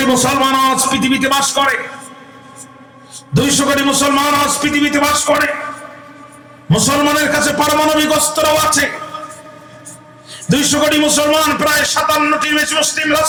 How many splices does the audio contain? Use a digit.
0